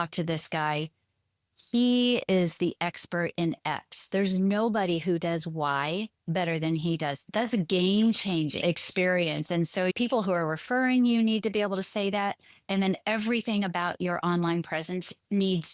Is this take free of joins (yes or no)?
no